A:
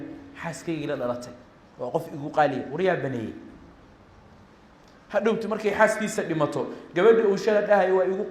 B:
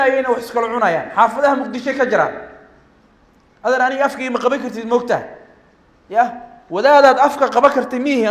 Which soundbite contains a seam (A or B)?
A